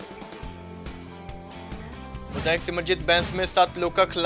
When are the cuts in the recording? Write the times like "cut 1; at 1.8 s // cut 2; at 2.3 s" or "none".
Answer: cut 1; at 2.2 s